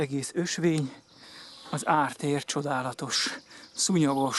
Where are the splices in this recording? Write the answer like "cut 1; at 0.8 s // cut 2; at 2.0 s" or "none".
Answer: none